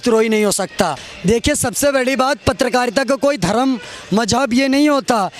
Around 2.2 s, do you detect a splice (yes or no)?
no